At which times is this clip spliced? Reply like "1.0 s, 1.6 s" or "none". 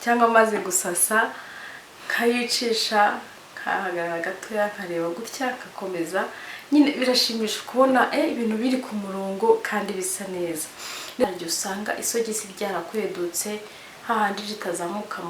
11.2 s